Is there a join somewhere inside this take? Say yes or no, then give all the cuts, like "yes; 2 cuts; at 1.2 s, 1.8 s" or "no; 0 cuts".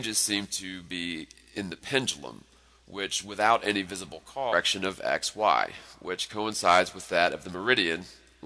no; 0 cuts